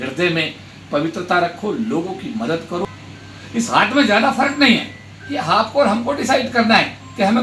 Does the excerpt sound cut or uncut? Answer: cut